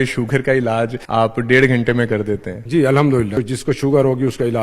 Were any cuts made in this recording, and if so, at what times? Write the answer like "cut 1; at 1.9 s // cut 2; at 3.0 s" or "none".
cut 1; at 1.0 s // cut 2; at 2.5 s // cut 3; at 3.4 s